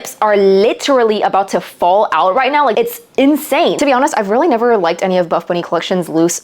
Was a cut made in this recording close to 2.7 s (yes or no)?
yes